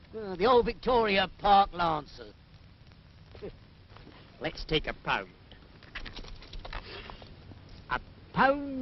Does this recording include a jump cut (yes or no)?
yes